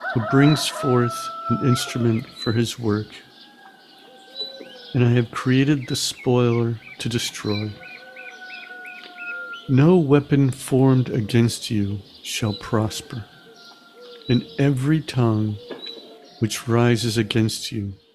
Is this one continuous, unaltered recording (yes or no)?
yes